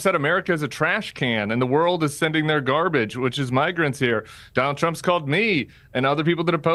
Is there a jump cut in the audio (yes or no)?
no